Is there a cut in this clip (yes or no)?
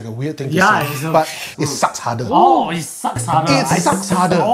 yes